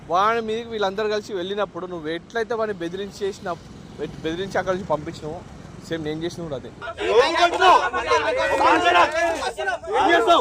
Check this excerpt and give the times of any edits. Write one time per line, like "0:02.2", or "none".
none

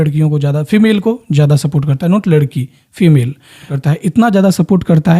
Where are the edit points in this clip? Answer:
0:03.6

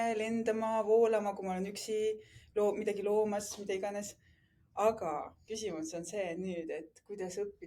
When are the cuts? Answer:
none

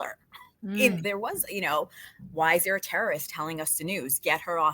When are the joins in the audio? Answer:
0:01.0

